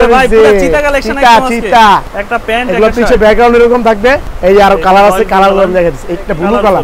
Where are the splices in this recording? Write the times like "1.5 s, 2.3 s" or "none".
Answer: 2.2 s, 4.3 s